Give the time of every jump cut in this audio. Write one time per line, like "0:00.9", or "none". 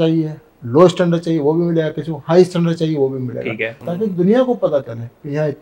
0:03.8